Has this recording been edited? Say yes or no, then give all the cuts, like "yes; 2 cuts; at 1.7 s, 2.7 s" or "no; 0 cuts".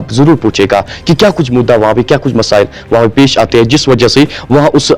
no; 0 cuts